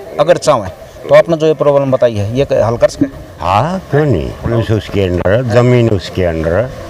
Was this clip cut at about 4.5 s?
yes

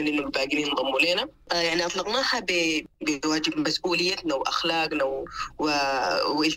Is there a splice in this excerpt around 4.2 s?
no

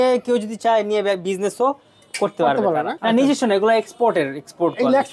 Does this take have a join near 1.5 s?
no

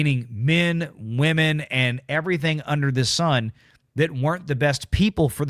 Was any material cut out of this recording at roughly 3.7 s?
no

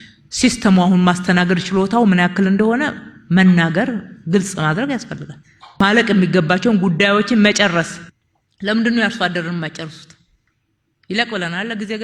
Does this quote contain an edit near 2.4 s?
no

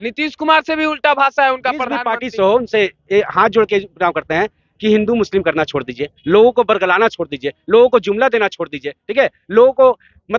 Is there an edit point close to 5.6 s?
yes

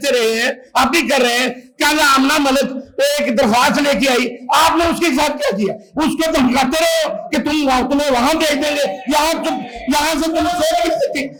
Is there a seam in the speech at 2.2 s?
no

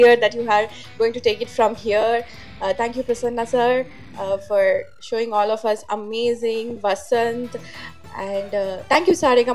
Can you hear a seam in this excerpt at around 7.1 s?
no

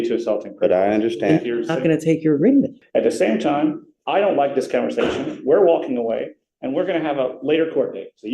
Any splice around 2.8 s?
yes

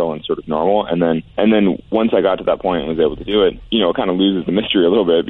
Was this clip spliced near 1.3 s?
yes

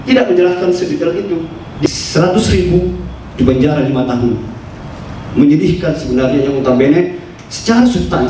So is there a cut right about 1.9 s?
yes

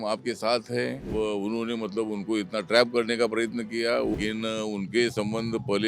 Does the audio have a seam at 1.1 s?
yes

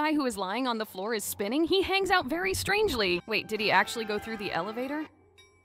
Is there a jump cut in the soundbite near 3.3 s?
yes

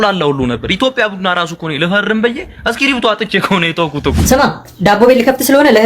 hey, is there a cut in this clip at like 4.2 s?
yes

